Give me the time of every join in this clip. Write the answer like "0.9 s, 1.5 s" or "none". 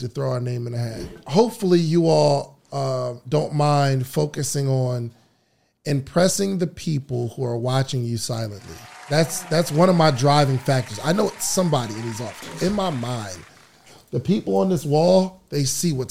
1.2 s